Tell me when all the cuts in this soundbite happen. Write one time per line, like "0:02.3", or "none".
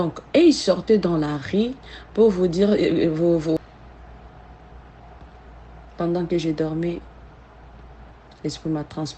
0:03.6